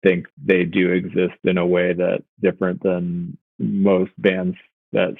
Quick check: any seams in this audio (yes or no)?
no